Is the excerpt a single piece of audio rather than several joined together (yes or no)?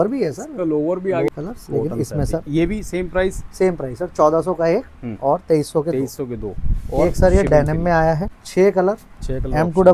no